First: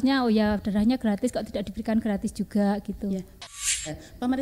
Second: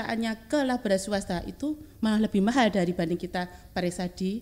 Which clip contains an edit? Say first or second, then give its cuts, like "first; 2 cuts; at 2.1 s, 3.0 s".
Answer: first; 1 cut; at 3.5 s